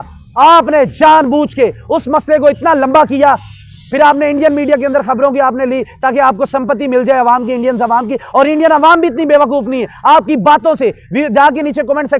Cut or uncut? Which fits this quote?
uncut